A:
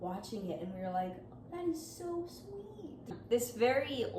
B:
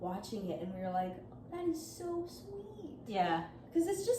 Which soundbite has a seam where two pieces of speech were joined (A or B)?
A